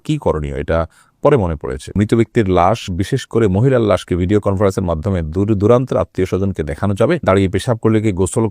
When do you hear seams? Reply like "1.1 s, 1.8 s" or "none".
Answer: 1.9 s, 7.2 s

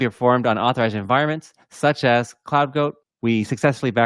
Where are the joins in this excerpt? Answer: 3.1 s

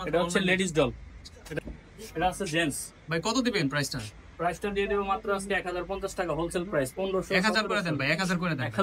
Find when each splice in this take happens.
1.6 s

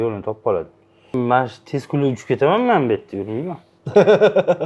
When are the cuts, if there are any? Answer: 1.1 s

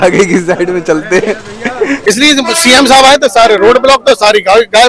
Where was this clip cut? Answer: 2.0 s

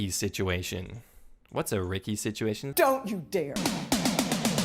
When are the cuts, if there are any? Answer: 2.7 s, 3.6 s

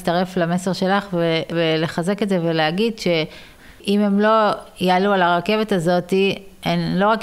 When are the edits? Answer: 1.5 s, 3.6 s

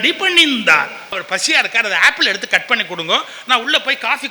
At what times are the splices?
1.1 s

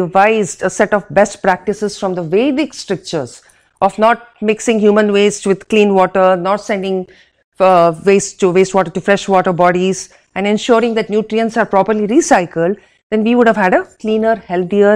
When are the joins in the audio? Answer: none

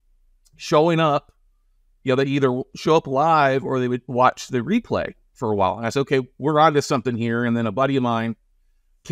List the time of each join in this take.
none

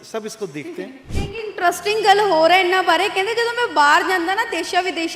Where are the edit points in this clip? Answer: 1.0 s

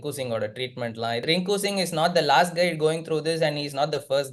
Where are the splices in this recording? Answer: 1.2 s

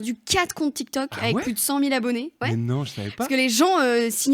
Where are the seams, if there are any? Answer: none

